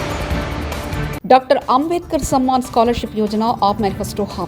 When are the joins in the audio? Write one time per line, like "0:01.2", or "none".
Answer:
0:01.1